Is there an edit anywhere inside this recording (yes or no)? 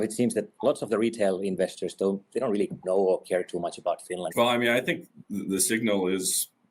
yes